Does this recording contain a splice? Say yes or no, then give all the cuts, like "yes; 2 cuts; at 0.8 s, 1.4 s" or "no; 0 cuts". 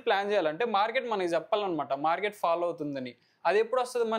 no; 0 cuts